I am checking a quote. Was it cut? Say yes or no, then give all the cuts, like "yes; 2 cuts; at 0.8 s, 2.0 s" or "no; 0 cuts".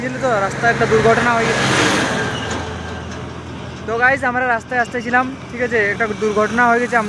no; 0 cuts